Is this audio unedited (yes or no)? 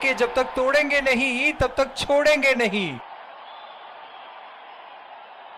yes